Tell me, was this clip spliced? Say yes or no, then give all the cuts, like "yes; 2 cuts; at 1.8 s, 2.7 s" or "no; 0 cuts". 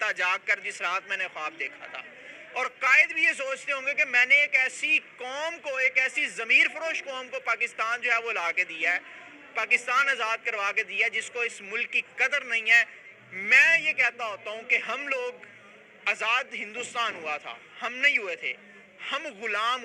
no; 0 cuts